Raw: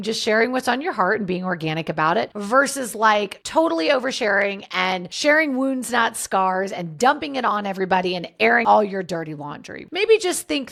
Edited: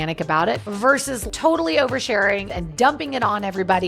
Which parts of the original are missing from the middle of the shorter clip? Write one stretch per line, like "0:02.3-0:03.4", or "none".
0:02.9-0:03.3
0:04.7-0:06.8